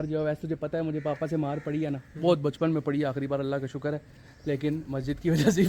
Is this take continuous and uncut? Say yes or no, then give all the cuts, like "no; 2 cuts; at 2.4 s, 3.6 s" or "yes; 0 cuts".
yes; 0 cuts